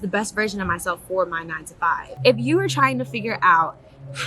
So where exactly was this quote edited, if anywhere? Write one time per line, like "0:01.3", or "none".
0:02.1